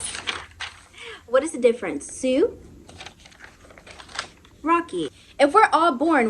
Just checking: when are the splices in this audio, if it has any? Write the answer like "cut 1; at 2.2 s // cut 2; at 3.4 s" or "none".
cut 1; at 5.2 s

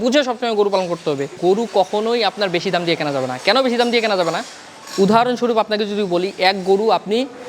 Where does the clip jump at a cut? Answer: cut 1; at 1.3 s

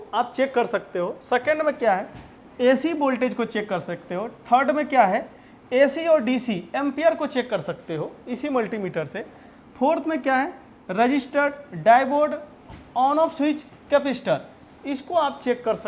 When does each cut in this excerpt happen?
none

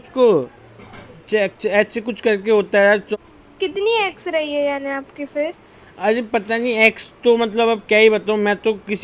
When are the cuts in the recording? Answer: cut 1; at 3.1 s

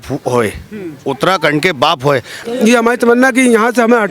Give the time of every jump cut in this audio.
cut 1; at 2.4 s

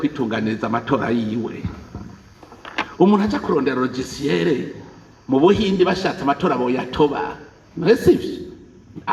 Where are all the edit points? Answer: none

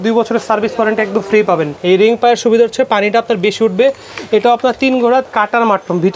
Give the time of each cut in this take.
cut 1; at 1.7 s // cut 2; at 5.3 s

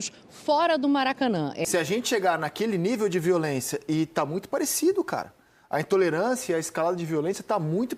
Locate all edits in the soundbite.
cut 1; at 1.6 s

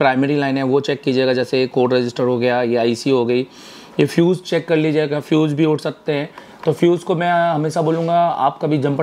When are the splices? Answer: none

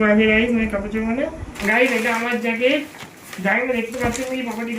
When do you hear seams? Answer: cut 1; at 1.5 s

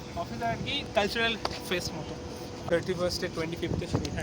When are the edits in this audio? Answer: cut 1; at 2.7 s

